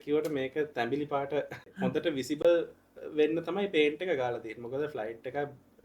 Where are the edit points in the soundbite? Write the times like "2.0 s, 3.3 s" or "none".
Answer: 1.7 s